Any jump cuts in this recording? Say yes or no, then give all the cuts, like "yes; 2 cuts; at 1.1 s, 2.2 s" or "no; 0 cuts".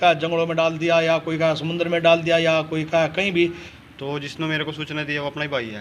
yes; 1 cut; at 3.7 s